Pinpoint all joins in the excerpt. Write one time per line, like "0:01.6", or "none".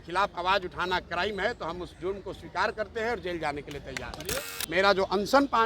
0:04.2